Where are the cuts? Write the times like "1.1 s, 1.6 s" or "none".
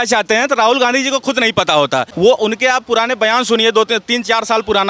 2.1 s